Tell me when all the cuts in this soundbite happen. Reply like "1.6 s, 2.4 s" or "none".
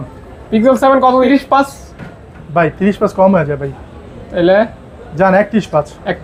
none